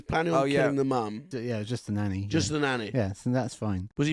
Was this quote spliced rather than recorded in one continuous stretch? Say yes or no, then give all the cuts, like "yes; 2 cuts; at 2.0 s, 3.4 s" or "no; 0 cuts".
yes; 1 cut; at 1.3 s